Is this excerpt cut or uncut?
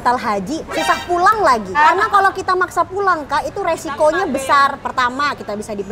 cut